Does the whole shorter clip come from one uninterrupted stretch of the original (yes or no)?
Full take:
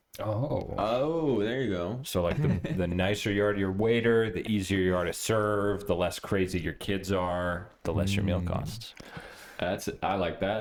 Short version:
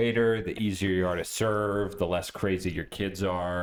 yes